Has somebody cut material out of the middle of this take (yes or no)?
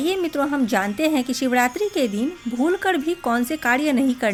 no